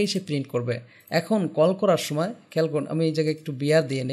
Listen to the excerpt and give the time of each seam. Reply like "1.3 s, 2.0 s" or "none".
none